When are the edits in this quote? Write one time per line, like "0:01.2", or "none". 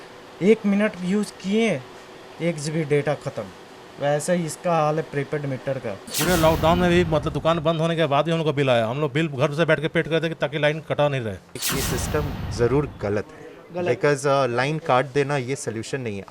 0:06.1
0:11.7